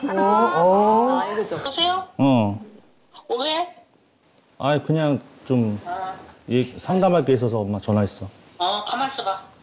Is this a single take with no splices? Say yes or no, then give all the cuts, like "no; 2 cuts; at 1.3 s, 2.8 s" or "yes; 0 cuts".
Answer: no; 1 cut; at 1.7 s